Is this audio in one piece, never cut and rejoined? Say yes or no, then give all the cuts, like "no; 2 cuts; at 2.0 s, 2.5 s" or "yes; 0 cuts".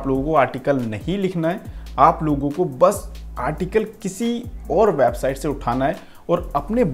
yes; 0 cuts